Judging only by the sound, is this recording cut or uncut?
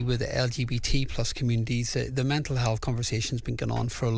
uncut